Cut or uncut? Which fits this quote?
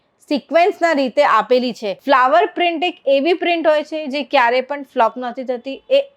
cut